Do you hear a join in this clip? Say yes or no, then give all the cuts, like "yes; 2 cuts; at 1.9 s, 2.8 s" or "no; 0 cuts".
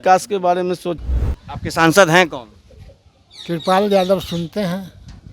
yes; 1 cut; at 1.0 s